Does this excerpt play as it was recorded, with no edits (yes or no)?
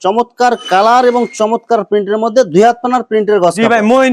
yes